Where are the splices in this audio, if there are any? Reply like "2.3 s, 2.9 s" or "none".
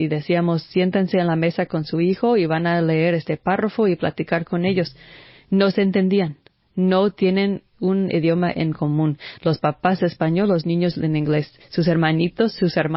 none

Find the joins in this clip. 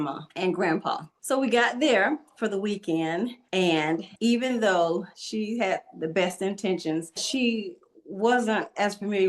1.1 s, 3.8 s, 5.2 s, 7.2 s

